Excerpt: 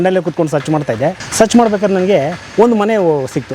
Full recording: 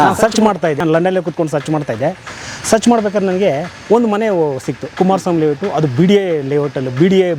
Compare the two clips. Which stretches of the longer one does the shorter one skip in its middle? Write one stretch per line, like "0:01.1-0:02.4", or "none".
0:02.2-0:02.6